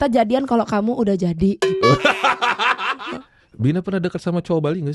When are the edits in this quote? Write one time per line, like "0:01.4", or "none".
0:02.9